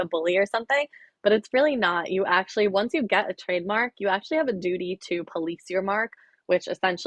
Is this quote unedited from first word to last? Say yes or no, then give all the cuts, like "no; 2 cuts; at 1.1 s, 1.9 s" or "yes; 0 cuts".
yes; 0 cuts